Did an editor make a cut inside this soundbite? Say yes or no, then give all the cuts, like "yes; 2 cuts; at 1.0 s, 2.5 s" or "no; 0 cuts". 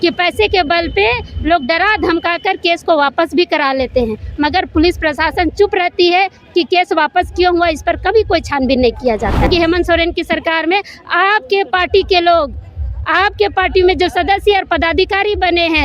yes; 1 cut; at 9.5 s